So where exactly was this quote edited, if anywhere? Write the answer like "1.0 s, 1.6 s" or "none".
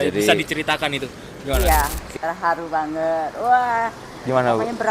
1.6 s